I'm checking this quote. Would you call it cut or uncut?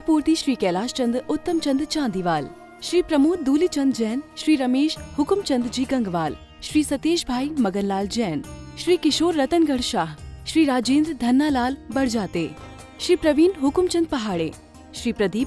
uncut